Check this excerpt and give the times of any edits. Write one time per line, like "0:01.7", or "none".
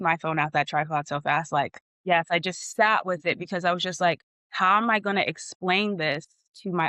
0:02.1